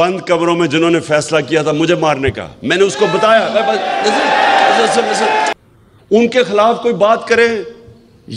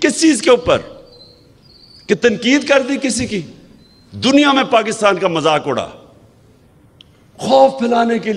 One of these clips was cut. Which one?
first; 1 cut; at 5.5 s

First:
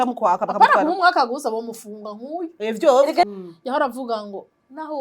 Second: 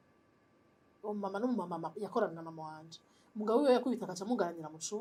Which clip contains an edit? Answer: first; 1 cut; at 3.2 s

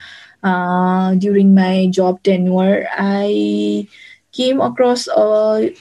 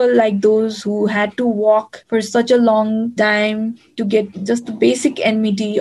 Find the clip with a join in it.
second; 2 cuts; at 2.0 s, 4.3 s

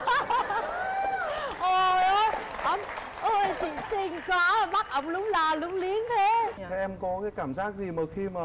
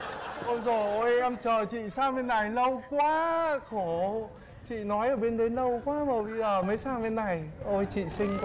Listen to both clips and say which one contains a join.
first; 1 cut; at 6.6 s

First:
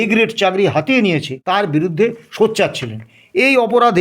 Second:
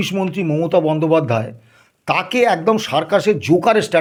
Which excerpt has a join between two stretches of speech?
first; 1 cut; at 1.6 s

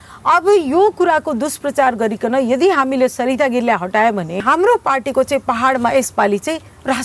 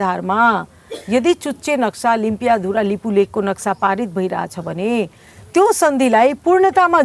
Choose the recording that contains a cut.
first; 1 cut; at 4.4 s

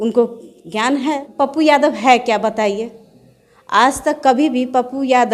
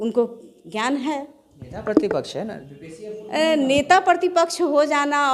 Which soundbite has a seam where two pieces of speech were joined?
first; 1 cut; at 1.3 s

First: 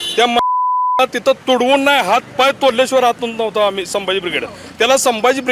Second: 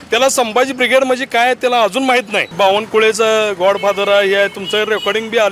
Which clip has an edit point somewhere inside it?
second; 1 cut; at 2.5 s

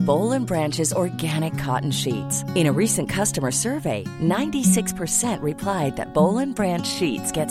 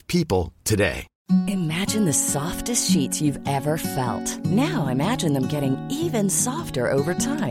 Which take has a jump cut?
second; 1 cut; at 1.1 s

